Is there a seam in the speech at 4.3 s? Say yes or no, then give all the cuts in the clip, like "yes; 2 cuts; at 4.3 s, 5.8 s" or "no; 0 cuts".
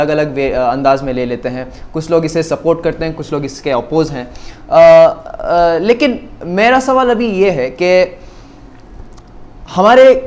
no; 0 cuts